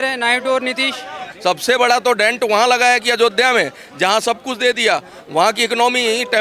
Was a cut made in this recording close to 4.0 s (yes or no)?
no